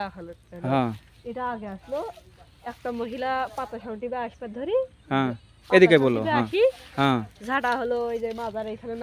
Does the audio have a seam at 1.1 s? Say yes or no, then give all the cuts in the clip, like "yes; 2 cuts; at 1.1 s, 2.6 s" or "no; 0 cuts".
no; 0 cuts